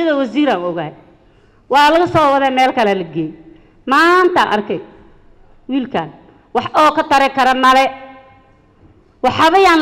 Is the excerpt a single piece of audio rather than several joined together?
yes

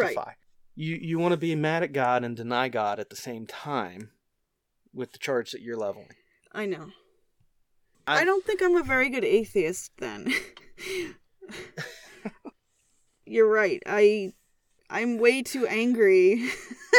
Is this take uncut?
yes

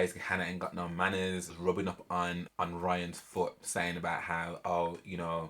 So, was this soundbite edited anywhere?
yes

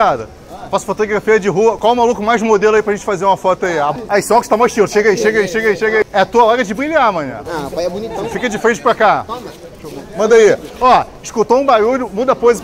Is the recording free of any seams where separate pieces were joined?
no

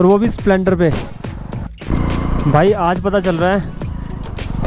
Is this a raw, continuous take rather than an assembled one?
no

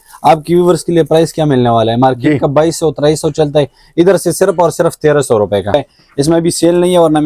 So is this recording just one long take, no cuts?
no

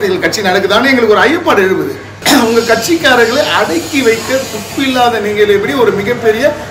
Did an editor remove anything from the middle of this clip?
yes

